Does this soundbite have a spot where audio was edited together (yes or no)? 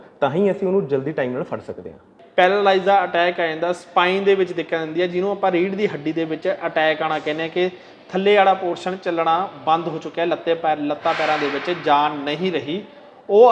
yes